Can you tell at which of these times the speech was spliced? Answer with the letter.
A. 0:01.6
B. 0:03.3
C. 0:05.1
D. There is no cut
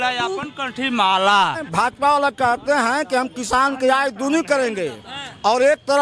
A